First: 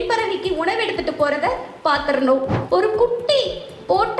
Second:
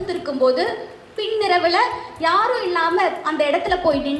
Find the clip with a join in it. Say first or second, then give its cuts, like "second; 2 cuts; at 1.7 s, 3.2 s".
first; 1 cut; at 2.6 s